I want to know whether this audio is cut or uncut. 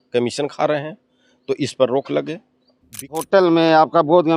cut